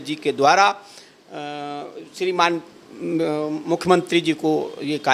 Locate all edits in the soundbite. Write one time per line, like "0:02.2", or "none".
none